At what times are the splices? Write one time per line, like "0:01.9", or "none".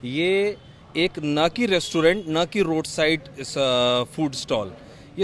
none

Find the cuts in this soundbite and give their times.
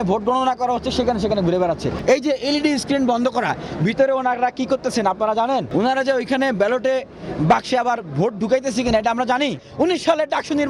0:02.0
0:05.7
0:09.6

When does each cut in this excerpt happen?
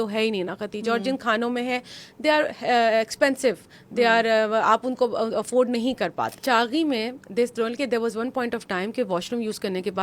0:06.3

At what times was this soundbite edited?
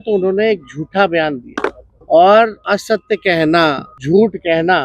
0:01.5
0:02.6
0:03.9

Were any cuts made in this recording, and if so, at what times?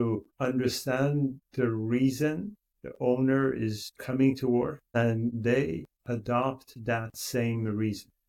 none

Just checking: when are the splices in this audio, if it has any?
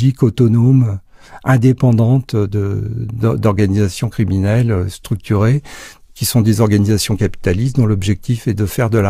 none

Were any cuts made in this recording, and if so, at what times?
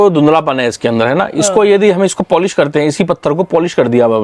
none

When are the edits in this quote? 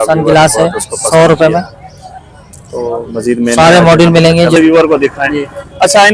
0:04.6

